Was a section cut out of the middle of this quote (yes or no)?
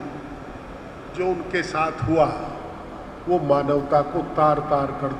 no